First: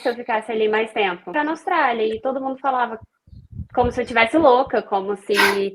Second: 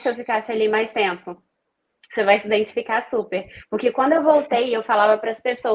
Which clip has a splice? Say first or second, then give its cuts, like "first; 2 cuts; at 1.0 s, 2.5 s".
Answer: first; 1 cut; at 1.4 s